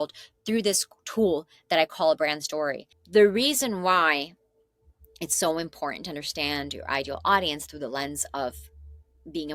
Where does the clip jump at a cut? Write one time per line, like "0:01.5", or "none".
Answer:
0:02.9